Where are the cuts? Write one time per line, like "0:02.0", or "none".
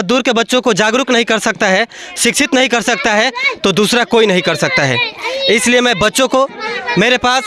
none